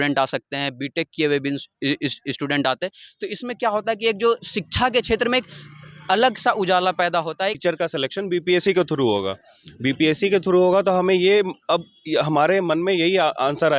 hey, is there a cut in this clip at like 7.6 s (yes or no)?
yes